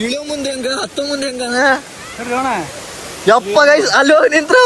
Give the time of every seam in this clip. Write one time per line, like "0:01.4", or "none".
none

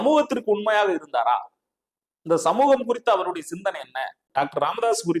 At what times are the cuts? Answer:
0:04.2

